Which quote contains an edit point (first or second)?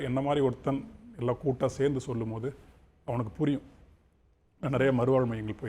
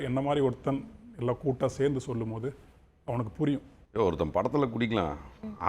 second